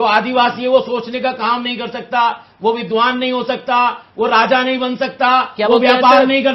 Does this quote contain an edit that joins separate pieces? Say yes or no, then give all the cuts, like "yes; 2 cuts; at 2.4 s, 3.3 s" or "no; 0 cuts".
no; 0 cuts